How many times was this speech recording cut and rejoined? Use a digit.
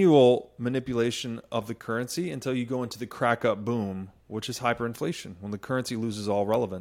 0